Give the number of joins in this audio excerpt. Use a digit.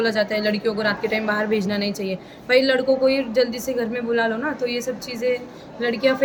0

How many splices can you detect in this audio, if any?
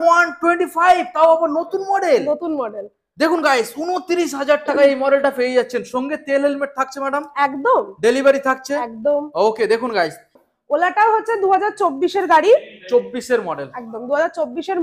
1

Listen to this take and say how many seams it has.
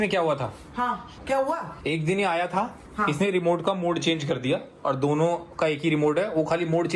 1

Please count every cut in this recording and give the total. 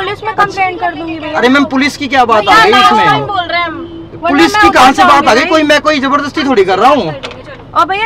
0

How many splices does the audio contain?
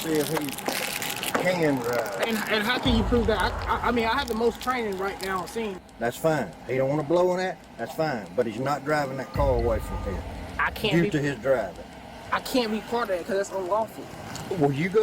2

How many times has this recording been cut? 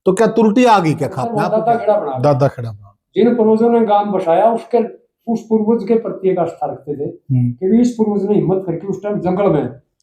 1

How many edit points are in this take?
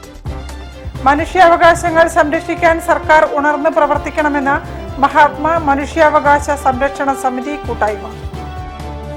0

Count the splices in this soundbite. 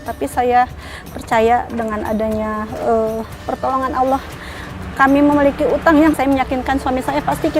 1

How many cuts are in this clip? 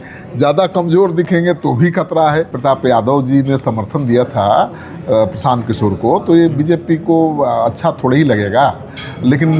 1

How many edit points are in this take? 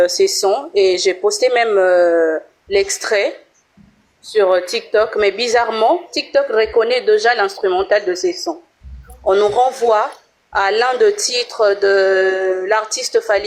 0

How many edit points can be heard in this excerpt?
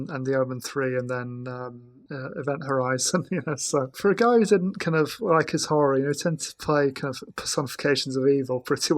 2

